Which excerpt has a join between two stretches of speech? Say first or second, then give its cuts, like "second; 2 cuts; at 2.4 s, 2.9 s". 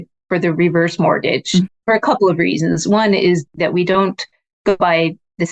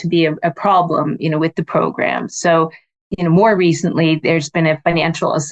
first; 3 cuts; at 1.7 s, 3.4 s, 4.8 s